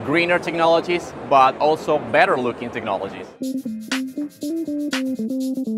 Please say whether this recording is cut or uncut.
uncut